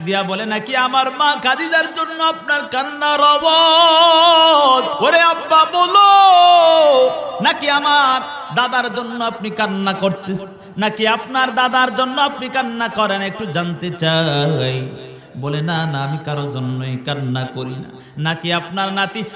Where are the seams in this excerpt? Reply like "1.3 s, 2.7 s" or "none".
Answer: 4.9 s